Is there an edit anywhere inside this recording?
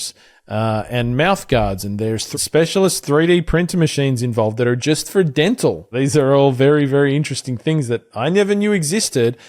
yes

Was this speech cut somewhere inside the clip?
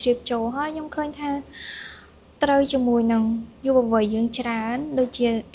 no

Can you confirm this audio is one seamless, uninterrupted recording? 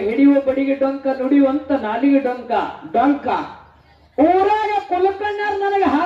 yes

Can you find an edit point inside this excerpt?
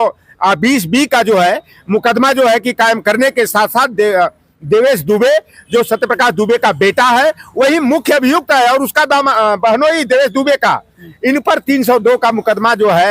no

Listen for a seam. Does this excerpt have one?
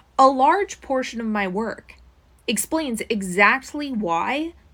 no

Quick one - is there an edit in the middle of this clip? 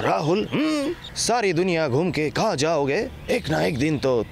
yes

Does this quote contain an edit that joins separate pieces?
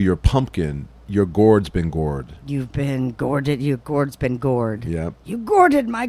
no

